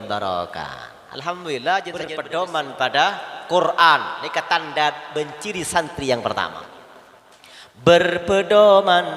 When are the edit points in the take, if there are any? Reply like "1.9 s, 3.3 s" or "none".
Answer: 2.2 s